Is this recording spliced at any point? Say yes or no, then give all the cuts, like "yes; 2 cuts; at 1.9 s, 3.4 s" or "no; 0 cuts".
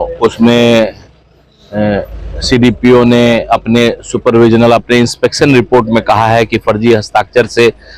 no; 0 cuts